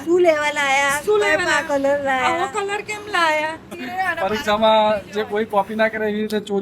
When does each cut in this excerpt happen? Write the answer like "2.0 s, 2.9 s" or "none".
3.8 s